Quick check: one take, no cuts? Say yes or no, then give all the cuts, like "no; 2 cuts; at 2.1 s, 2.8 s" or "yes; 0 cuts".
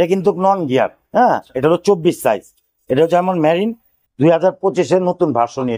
yes; 0 cuts